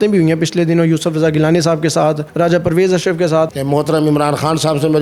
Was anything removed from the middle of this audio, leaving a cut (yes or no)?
yes